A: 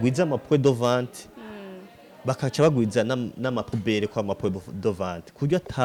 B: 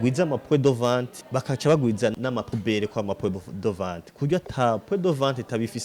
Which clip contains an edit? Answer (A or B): B